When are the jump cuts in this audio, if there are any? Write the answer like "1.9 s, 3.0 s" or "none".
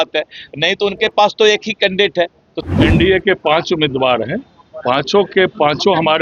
2.5 s